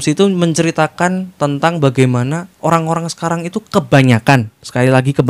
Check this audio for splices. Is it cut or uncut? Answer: uncut